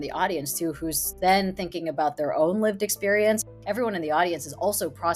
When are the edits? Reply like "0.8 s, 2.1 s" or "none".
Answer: 3.4 s